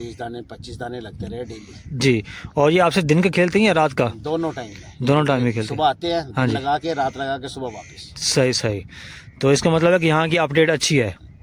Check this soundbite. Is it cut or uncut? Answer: uncut